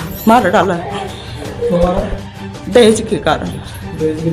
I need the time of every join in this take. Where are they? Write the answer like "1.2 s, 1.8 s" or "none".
none

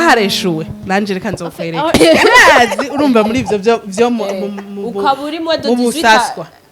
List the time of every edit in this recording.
1.9 s

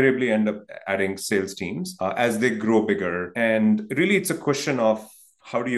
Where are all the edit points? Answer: 1.9 s, 3.2 s

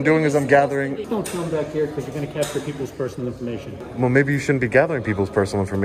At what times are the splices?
1.0 s, 3.9 s

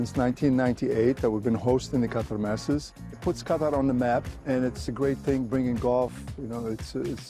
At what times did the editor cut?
3.0 s, 4.7 s

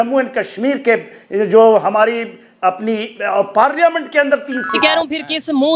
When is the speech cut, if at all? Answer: 4.7 s

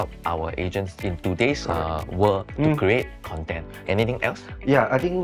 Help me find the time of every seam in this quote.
none

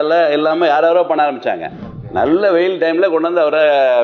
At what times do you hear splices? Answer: 2.0 s

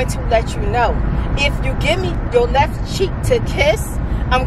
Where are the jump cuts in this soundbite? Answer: 2.1 s

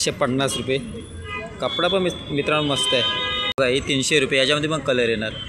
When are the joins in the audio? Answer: 3.6 s

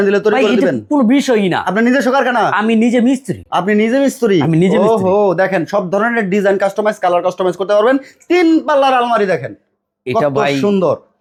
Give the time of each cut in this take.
none

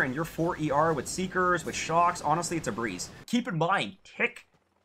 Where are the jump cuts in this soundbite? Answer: 3.2 s

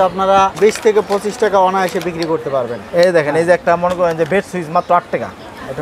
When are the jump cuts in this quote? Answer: none

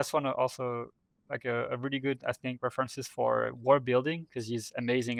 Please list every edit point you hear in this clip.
none

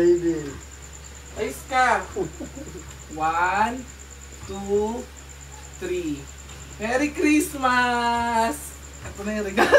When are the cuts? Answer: none

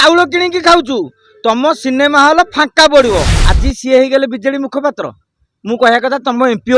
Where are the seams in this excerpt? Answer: 3.4 s

